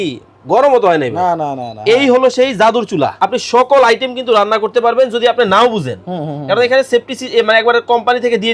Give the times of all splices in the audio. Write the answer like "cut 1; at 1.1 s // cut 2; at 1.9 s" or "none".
cut 1; at 3.1 s

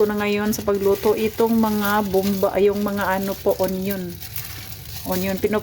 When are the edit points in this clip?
none

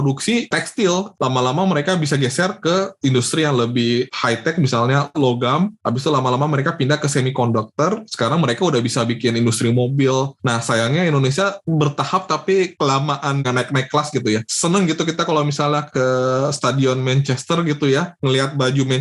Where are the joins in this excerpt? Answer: cut 1; at 1.1 s // cut 2; at 10.4 s // cut 3; at 13.4 s // cut 4; at 14.5 s

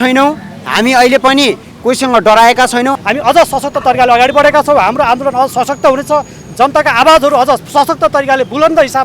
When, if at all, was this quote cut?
cut 1; at 3.0 s

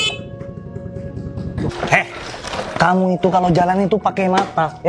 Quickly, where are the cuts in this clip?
cut 1; at 1.7 s

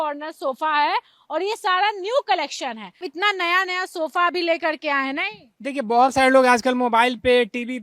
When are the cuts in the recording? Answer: none

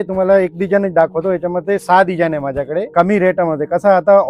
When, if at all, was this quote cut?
cut 1; at 2.9 s

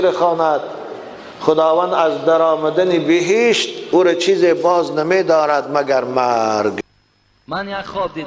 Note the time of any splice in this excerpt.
cut 1; at 6.8 s

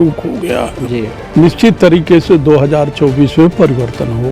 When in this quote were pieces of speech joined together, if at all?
cut 1; at 1.1 s

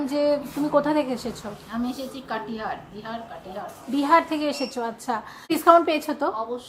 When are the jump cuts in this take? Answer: cut 1; at 5.5 s

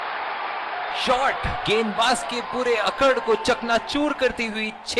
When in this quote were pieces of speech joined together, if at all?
cut 1; at 1.0 s

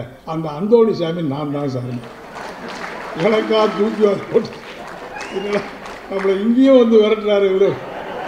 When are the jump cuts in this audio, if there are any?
none

